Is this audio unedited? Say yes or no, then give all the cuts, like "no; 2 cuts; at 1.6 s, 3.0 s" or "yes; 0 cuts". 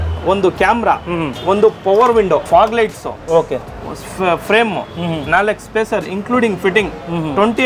no; 2 cuts; at 1.3 s, 2.4 s